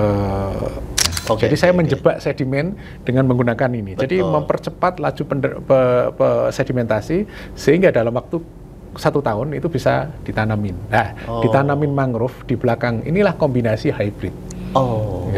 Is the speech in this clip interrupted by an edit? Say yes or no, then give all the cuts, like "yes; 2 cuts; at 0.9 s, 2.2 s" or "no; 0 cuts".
yes; 1 cut; at 1.0 s